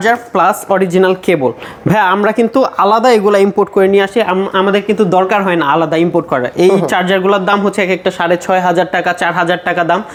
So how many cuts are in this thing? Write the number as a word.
zero